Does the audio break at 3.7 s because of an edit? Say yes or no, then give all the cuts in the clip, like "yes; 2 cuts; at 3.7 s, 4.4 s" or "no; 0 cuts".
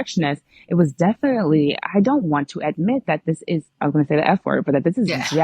yes; 1 cut; at 3.7 s